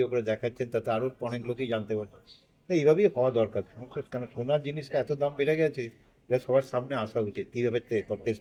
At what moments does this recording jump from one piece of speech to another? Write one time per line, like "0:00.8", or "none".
none